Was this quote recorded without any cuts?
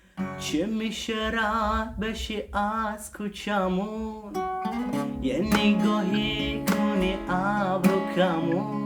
yes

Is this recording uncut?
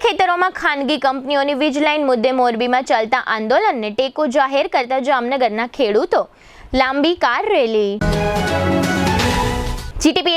yes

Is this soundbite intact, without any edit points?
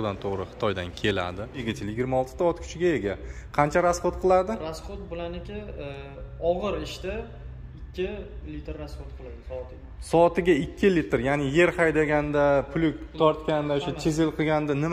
no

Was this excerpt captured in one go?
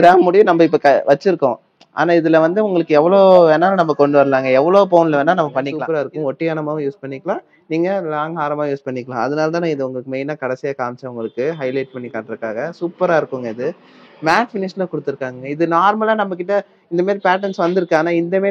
no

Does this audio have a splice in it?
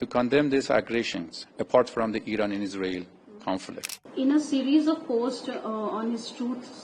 yes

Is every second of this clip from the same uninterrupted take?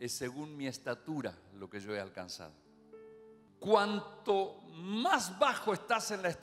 no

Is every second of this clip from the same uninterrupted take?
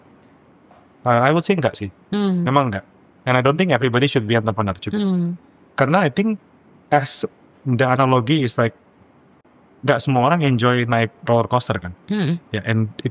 yes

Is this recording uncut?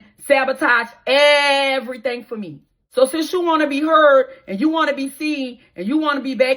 no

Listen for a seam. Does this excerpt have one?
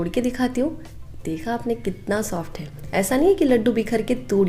no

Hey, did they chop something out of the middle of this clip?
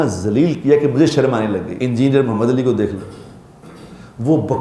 yes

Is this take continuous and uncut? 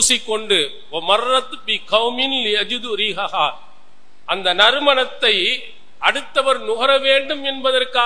yes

